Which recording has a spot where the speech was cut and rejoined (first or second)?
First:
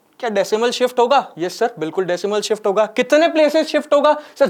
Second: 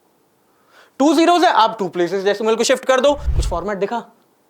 second